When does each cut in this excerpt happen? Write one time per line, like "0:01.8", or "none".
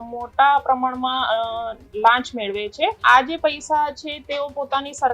0:03.0